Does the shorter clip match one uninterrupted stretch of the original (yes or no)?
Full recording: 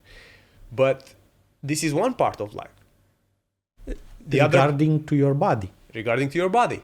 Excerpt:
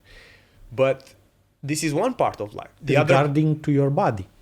no